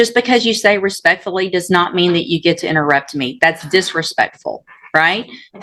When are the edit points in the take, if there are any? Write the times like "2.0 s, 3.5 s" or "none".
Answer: none